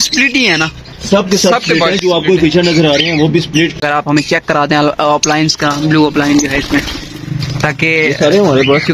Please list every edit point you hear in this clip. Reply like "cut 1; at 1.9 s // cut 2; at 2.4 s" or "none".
cut 1; at 3.8 s